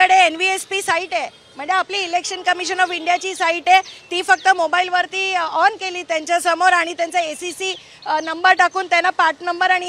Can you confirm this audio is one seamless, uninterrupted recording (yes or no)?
yes